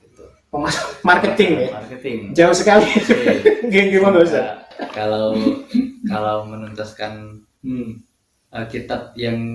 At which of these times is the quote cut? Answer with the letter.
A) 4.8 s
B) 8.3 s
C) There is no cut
A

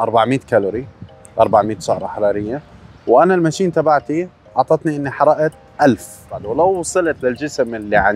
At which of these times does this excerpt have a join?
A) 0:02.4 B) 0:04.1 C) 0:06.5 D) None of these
C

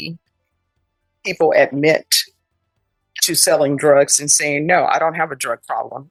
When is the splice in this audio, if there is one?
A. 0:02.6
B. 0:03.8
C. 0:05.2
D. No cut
D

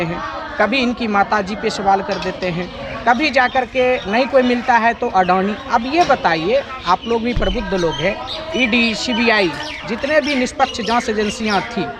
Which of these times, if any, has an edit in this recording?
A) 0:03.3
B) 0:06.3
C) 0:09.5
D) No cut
D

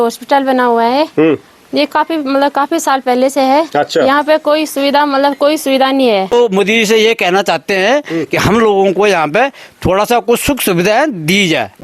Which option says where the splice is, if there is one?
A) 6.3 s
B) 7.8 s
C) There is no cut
A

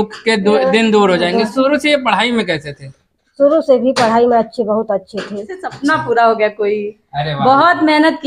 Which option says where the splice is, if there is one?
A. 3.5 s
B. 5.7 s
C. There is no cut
B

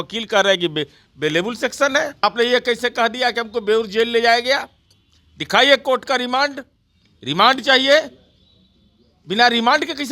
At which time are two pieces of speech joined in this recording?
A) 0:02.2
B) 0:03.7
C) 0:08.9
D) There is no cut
A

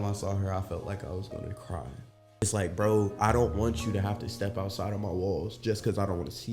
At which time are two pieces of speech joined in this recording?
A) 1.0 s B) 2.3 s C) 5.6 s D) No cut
B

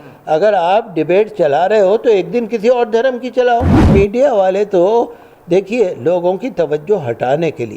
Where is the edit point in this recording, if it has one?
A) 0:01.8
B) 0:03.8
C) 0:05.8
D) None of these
B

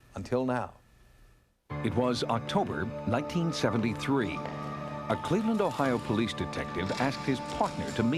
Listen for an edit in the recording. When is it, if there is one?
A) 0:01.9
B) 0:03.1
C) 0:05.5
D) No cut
A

